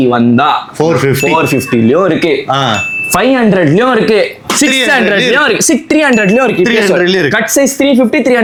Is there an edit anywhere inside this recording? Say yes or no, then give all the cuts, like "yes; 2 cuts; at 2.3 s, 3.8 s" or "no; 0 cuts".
no; 0 cuts